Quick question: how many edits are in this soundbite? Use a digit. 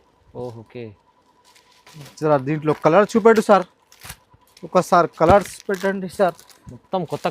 1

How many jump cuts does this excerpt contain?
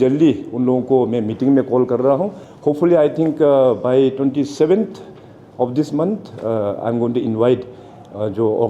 1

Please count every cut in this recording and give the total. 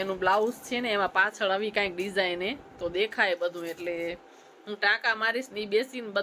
0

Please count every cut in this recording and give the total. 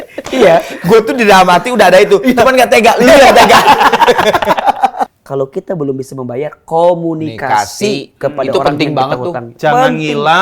1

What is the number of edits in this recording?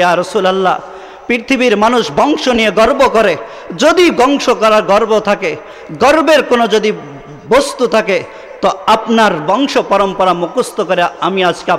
0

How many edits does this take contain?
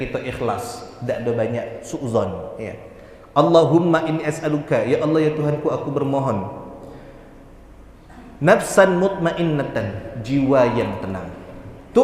0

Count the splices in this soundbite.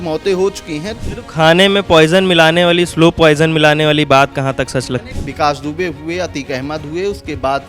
2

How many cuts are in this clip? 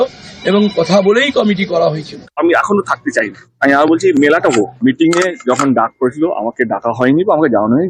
0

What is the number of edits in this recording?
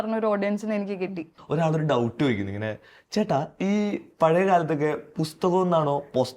1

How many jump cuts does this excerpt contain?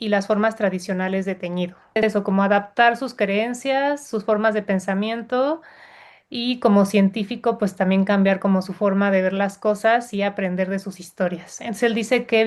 1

